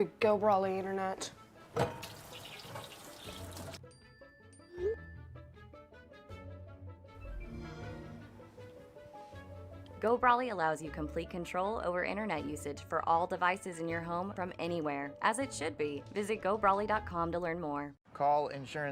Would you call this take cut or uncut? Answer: cut